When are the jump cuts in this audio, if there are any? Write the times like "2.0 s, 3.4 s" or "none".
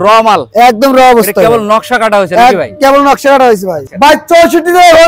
3.8 s